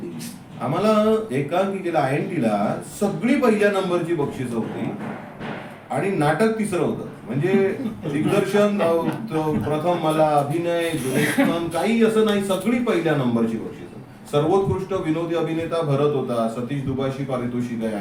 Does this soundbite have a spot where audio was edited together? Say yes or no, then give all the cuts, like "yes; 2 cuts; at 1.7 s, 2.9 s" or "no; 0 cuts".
no; 0 cuts